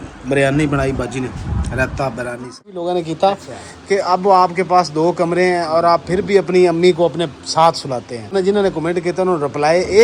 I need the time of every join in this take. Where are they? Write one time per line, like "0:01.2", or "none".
0:02.7
0:08.3